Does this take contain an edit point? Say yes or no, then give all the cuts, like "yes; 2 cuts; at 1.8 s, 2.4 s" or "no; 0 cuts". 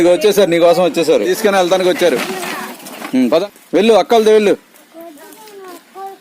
yes; 2 cuts; at 1.3 s, 3.4 s